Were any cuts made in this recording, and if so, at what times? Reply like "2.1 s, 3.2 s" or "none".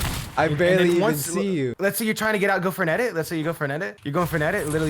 1.7 s, 3.9 s